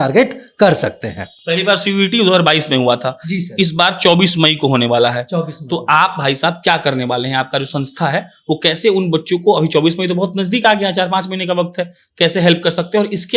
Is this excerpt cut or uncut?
uncut